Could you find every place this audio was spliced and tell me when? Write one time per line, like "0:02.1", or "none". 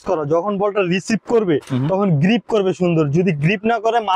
none

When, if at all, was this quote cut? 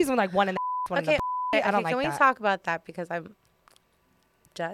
none

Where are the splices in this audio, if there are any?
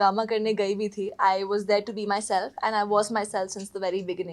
none

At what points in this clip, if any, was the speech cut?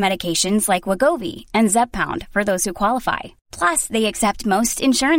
none

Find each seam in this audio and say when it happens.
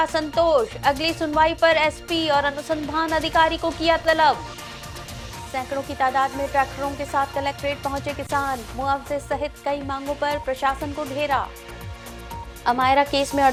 none

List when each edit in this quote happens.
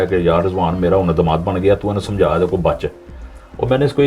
none

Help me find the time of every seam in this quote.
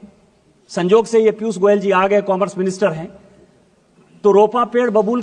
none

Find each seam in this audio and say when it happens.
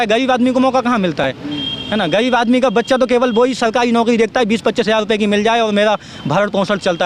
none

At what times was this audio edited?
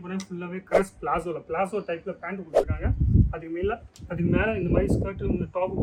none

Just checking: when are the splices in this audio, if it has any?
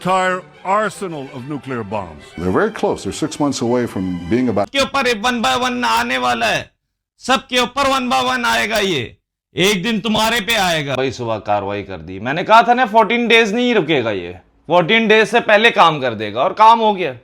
0:04.7
0:11.0

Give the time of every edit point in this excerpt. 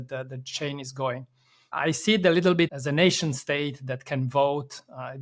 0:01.7
0:02.7

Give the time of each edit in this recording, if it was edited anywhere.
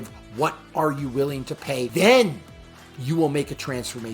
0:01.9

